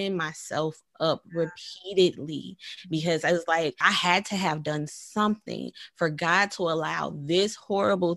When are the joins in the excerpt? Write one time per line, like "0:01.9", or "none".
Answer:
0:03.8